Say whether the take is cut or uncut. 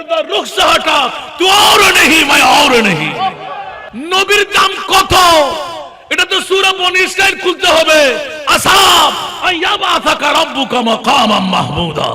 cut